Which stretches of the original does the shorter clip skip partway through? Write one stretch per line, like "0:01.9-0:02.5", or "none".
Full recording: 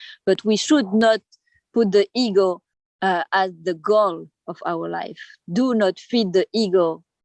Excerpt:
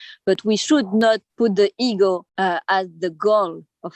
0:01.3-0:01.6
0:02.6-0:02.9